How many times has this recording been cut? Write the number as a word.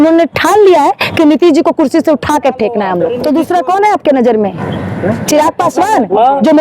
one